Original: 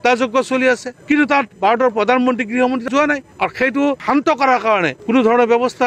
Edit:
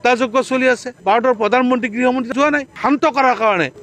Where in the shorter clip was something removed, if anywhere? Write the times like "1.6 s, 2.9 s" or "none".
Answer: 1.0 s, 2.8 s